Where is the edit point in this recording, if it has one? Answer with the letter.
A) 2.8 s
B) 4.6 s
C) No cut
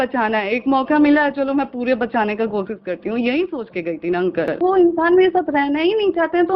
B